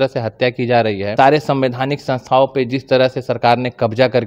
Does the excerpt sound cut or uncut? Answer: cut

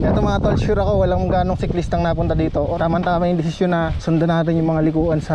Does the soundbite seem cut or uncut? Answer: cut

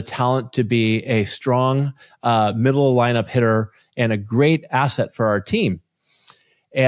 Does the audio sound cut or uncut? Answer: uncut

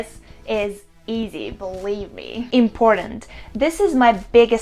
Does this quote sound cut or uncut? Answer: cut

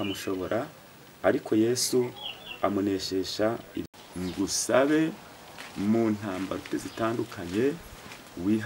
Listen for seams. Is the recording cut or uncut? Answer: cut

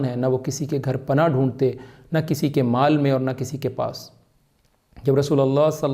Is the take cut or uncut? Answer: uncut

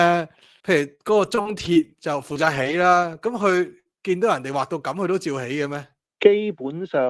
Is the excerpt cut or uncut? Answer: uncut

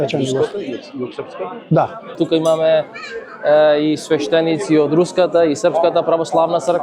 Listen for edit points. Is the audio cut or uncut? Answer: cut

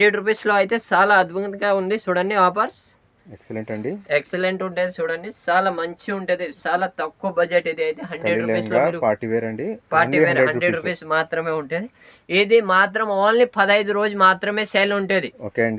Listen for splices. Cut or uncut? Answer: uncut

